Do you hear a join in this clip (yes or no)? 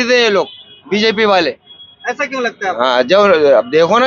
no